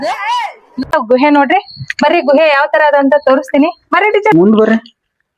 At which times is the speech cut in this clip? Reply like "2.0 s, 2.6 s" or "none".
0.9 s

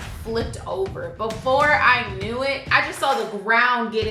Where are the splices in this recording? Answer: 2.7 s

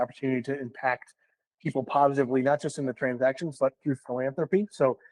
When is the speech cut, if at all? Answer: none

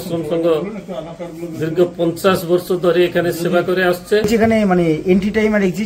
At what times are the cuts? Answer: 4.3 s

